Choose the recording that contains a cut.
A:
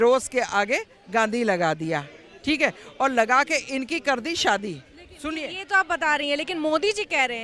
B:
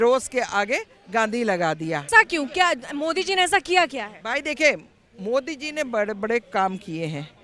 B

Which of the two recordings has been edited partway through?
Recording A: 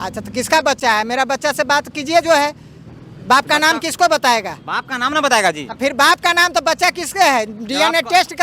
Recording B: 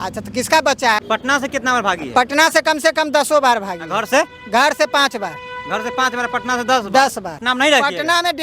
B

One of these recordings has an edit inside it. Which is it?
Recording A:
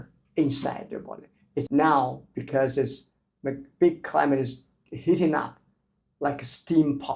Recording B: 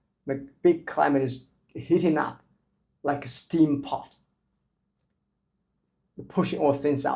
A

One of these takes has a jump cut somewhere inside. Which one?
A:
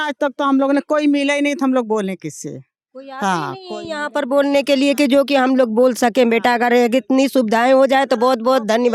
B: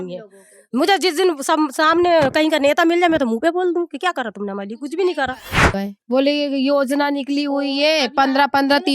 B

